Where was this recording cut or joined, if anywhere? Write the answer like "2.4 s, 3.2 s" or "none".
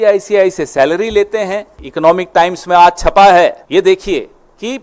1.8 s, 3.6 s